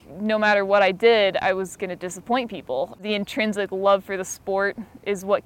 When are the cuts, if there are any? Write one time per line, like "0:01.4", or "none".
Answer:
0:03.0

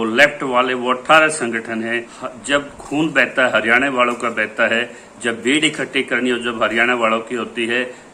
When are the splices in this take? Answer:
0:02.2

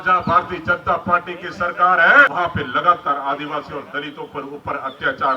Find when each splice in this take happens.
0:02.3

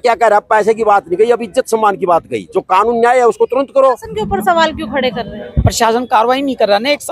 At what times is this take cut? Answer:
0:04.1

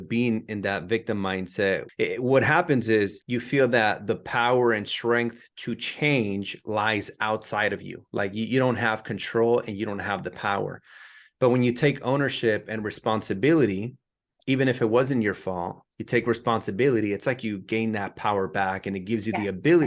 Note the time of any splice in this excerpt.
0:01.9
0:03.3

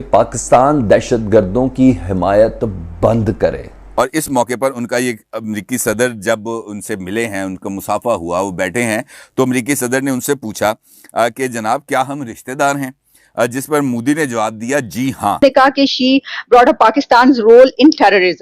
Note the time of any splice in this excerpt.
0:03.8
0:15.4

